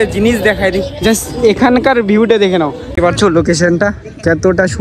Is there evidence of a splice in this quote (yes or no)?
yes